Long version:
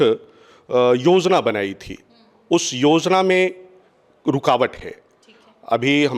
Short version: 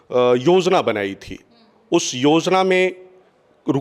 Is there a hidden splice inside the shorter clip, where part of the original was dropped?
no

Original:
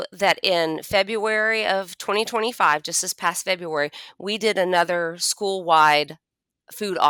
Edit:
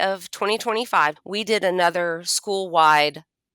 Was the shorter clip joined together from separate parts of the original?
yes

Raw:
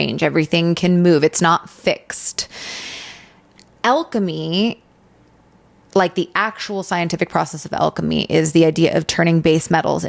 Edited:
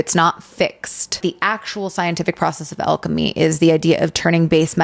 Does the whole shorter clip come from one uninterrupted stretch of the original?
no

